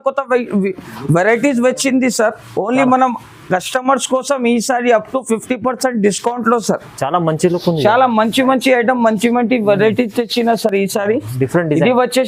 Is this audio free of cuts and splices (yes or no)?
yes